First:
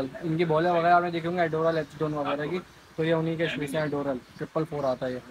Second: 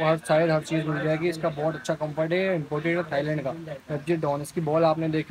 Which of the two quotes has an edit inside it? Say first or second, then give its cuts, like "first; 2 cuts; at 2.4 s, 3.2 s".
first; 1 cut; at 4.4 s